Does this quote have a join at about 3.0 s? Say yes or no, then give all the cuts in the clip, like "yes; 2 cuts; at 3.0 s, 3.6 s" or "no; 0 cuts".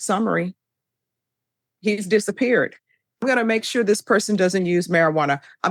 yes; 1 cut; at 3.0 s